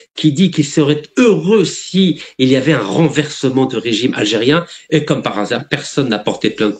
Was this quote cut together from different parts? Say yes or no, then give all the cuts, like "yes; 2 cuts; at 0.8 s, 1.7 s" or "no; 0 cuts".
no; 0 cuts